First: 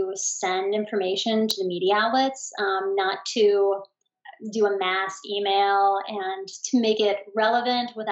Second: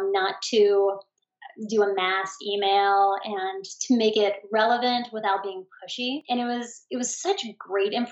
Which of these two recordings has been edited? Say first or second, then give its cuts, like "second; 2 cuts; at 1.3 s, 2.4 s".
second; 1 cut; at 6.2 s